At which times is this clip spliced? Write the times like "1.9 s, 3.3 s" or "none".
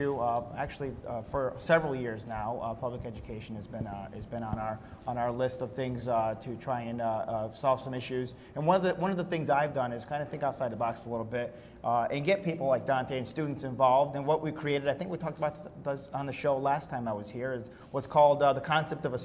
none